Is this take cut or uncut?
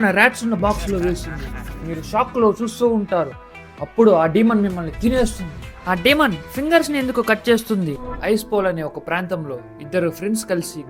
uncut